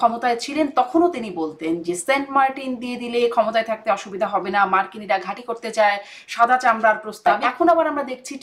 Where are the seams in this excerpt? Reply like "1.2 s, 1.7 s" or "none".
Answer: 7.3 s

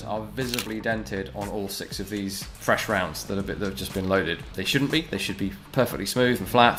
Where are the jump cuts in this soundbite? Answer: none

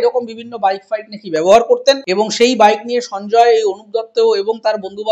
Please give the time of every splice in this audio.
2.1 s

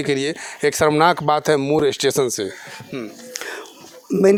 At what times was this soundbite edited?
none

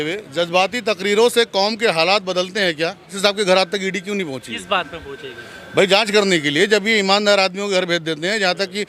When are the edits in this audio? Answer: 3.2 s

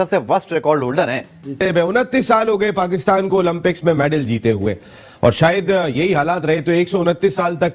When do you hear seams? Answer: 1.5 s

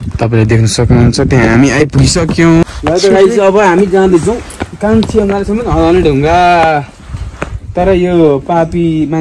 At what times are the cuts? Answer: 2.6 s

